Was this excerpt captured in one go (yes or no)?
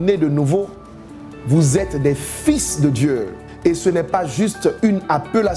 no